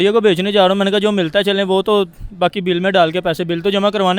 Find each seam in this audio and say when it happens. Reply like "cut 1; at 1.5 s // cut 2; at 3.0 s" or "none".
none